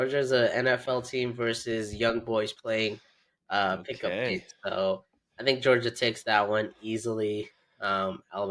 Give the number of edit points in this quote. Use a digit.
0